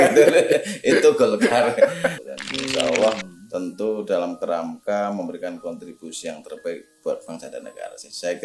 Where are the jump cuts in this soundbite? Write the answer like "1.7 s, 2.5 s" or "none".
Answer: 2.2 s